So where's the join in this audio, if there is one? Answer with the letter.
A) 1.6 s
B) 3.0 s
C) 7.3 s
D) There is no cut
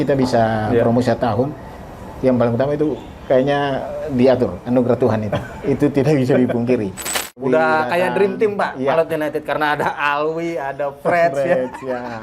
C